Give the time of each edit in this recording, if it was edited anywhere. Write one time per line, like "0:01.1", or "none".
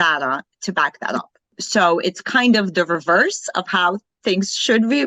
0:01.6